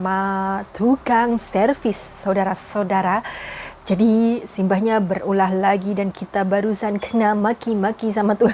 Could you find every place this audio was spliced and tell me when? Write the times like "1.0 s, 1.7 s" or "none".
none